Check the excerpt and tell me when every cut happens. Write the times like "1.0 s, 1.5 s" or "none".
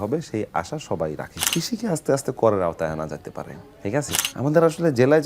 1.3 s, 4.2 s

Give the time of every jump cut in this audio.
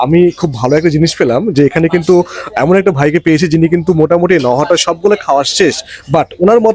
none

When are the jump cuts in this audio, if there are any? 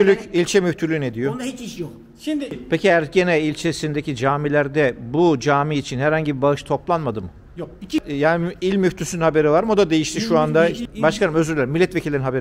2.6 s, 8.0 s, 10.9 s

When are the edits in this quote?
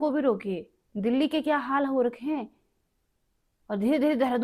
none

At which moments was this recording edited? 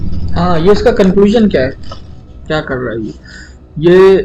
none

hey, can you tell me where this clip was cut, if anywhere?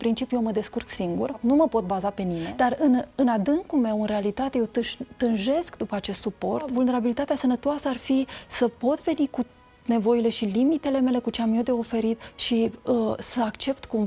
1.4 s, 2.4 s, 6.7 s

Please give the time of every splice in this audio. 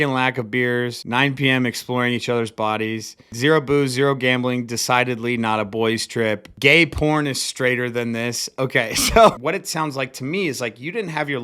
1.0 s, 9.4 s

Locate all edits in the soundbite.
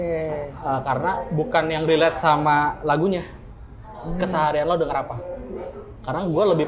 none

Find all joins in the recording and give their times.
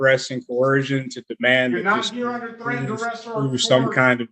none

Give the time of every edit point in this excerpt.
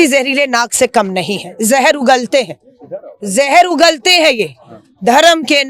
none

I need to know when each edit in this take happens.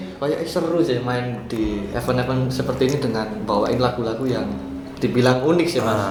none

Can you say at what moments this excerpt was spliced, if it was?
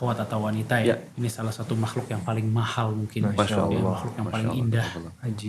1.1 s

